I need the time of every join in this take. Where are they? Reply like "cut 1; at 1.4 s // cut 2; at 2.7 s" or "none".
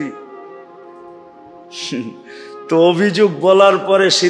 none

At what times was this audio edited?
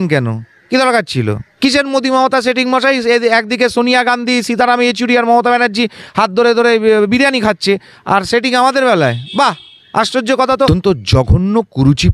cut 1; at 1.5 s // cut 2; at 10.7 s

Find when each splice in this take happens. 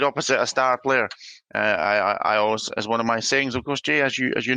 none

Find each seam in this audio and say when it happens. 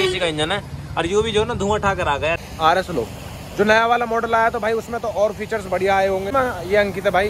cut 1; at 2.4 s // cut 2; at 6.3 s

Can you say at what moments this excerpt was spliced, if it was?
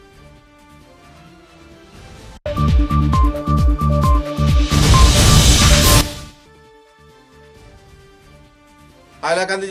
none

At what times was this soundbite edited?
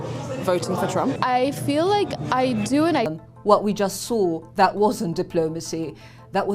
cut 1; at 3.1 s

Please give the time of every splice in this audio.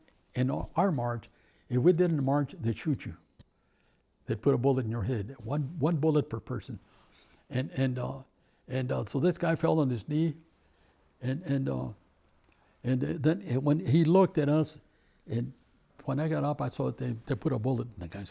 cut 1; at 15.9 s

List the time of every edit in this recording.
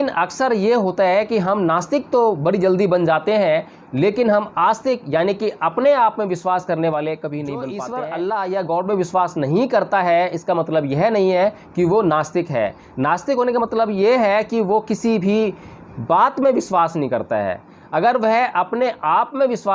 cut 1; at 7.8 s

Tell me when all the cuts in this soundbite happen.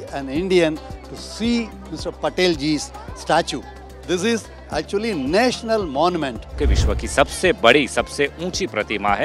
cut 1; at 6.6 s

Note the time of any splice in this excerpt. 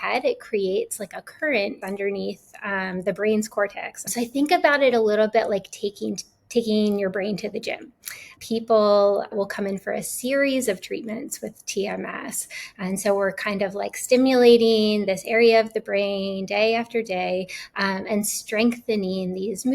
cut 1; at 1.8 s // cut 2; at 4.1 s // cut 3; at 8.3 s // cut 4; at 9.3 s

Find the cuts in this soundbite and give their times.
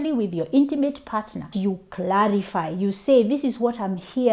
cut 1; at 1.5 s

